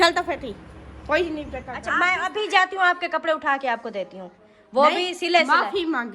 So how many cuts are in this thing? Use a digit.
1